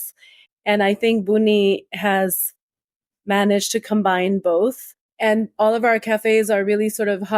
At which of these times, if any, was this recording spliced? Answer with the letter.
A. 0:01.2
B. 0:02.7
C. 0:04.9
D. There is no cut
C